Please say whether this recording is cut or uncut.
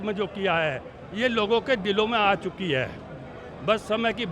uncut